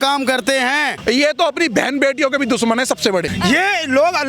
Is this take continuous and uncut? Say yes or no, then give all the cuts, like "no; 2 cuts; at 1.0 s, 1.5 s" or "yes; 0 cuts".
no; 2 cuts; at 0.9 s, 3.3 s